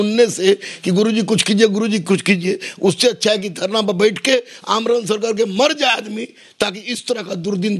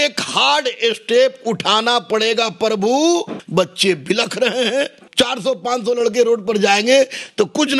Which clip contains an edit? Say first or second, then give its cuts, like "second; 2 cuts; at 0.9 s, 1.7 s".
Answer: second; 2 cuts; at 3.4 s, 5.0 s